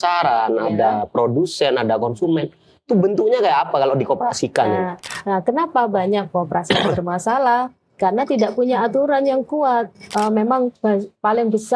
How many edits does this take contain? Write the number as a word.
two